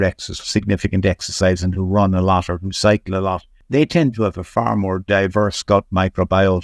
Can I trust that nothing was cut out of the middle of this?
no; 1 cut; at 3.5 s

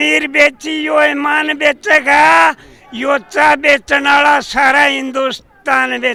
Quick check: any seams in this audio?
no; 0 cuts

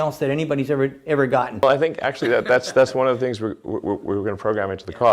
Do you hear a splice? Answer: yes; 1 cut; at 1.6 s

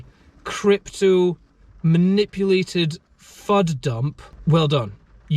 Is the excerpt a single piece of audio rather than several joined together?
no; 1 cut; at 4.2 s

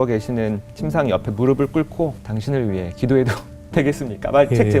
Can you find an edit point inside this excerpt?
yes; 1 cut; at 2.2 s

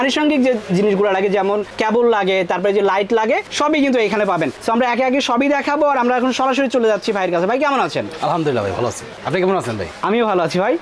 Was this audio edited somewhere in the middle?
no; 0 cuts

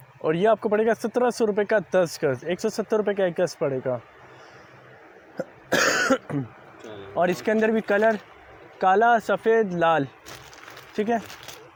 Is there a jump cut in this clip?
no; 0 cuts

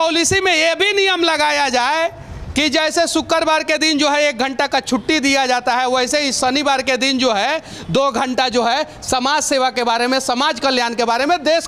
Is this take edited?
no; 0 cuts

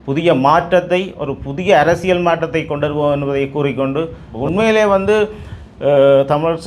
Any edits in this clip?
yes; 1 cut; at 4.2 s

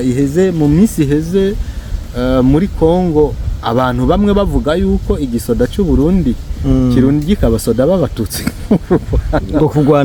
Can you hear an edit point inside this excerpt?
no; 0 cuts

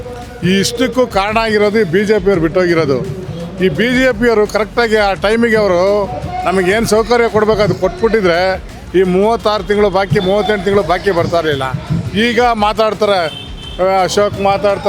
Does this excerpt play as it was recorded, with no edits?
yes; 0 cuts

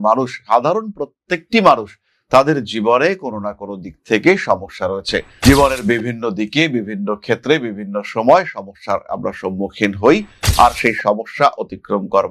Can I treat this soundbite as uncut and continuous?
no; 1 cut; at 5.2 s

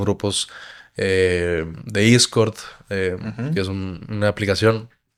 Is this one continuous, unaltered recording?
yes; 0 cuts

